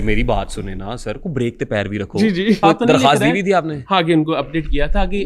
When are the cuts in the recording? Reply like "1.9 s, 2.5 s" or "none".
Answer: 2.6 s